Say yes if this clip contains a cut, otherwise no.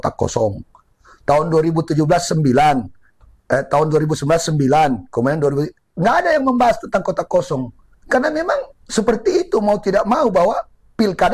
no